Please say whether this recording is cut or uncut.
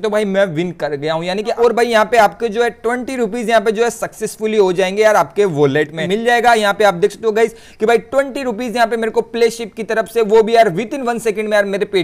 cut